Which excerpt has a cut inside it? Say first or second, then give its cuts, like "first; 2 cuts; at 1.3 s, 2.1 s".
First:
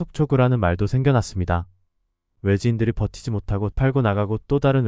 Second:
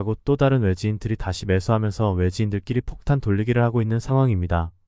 first; 1 cut; at 2.3 s